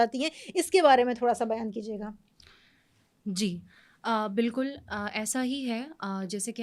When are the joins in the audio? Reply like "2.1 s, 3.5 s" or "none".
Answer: none